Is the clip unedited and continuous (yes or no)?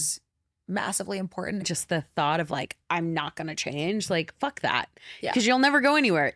no